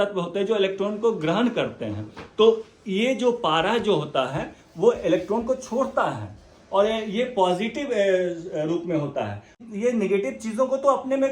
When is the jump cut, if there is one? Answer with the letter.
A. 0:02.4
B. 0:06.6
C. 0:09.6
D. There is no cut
C